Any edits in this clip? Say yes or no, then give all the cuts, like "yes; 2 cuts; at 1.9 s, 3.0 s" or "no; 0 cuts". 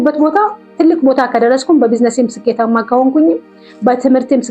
no; 0 cuts